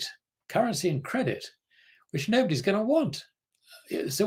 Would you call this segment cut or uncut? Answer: uncut